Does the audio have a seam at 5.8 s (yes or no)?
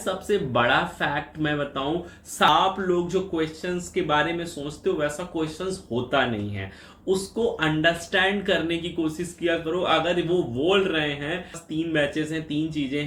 no